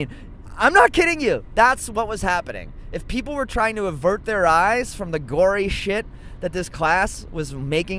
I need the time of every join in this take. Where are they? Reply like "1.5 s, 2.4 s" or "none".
none